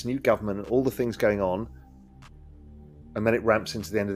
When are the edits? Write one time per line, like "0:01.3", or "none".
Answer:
none